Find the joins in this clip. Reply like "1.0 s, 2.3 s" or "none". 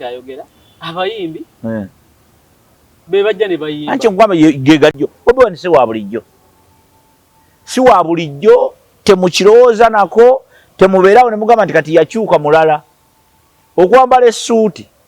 5.0 s

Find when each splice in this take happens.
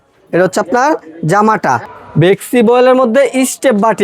2.0 s

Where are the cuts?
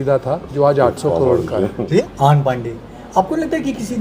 2.0 s

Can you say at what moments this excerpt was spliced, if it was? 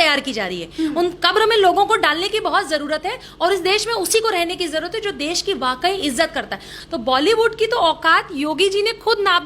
6.7 s

